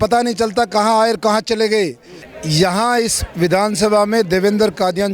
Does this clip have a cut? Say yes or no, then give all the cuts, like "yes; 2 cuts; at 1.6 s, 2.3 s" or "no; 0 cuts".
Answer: yes; 1 cut; at 2.3 s